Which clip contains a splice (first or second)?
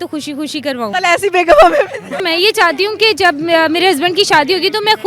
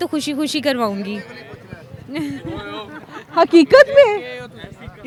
first